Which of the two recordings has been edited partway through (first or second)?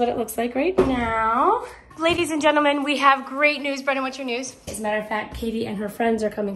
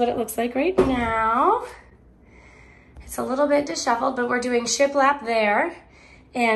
first